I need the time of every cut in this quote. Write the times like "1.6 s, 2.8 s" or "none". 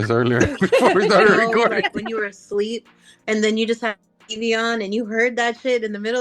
2.0 s

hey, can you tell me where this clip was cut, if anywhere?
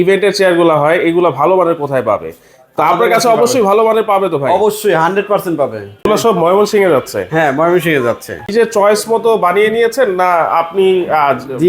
6.0 s, 8.5 s

